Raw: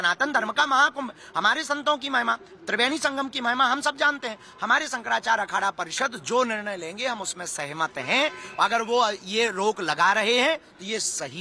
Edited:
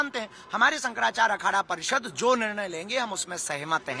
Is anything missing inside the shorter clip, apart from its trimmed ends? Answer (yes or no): no